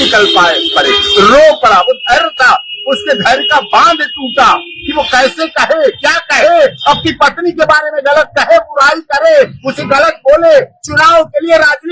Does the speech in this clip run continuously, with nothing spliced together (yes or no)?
yes